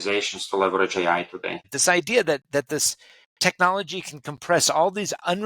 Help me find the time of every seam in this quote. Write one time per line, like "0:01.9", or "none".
0:01.7